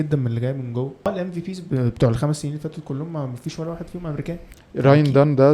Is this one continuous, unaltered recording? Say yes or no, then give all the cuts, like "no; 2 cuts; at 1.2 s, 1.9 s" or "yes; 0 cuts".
no; 2 cuts; at 1.1 s, 4.5 s